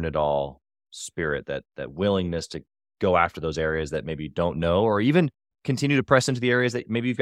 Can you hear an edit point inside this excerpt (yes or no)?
no